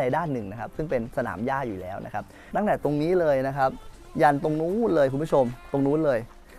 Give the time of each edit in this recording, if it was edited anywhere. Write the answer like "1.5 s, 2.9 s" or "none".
2.5 s